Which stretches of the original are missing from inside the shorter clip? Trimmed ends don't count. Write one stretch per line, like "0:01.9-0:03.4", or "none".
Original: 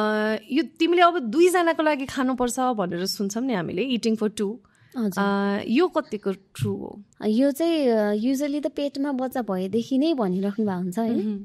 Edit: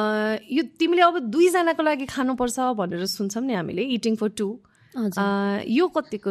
none